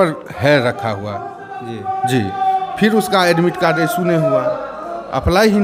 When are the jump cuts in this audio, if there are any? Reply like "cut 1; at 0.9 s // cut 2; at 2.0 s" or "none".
none